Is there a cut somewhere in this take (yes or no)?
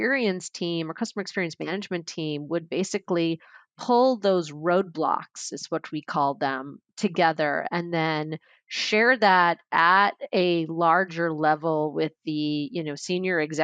no